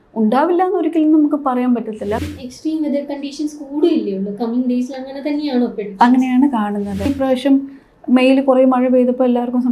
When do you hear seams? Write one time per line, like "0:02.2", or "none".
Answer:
0:02.3
0:07.1